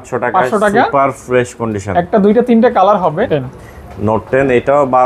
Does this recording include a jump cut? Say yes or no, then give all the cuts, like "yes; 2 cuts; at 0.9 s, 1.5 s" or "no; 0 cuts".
yes; 1 cut; at 3.3 s